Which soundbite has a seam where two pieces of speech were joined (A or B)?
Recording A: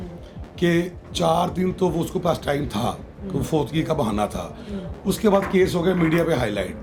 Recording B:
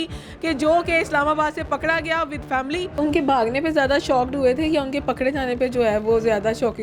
B